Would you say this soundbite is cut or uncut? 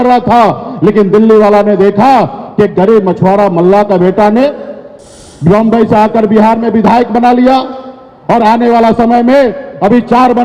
uncut